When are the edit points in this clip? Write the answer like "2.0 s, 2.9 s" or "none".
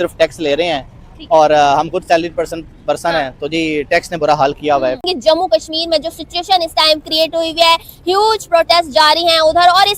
none